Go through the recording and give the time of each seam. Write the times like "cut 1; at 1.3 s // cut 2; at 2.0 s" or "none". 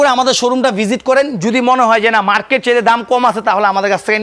none